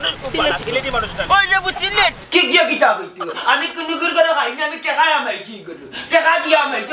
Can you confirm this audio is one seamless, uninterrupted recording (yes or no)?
no